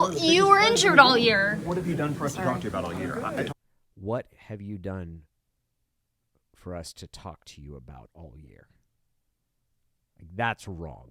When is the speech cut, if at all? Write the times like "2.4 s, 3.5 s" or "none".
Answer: 3.5 s

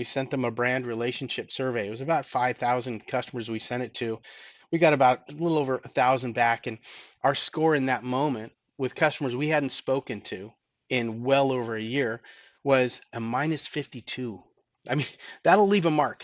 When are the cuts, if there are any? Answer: 5.2 s

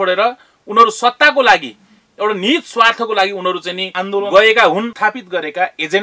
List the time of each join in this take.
4.9 s

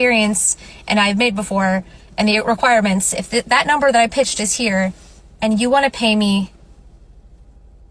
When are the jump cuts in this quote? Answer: none

